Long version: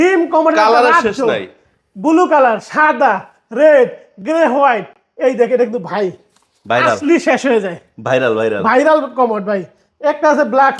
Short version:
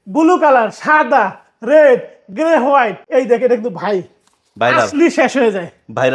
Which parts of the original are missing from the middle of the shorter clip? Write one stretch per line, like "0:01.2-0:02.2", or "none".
0:04.9-0:05.1